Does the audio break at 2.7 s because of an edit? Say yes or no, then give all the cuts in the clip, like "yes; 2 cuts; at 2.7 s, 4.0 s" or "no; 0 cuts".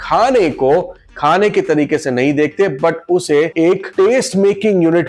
no; 0 cuts